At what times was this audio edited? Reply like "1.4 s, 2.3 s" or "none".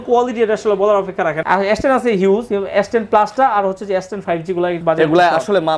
1.4 s, 2.5 s, 4.8 s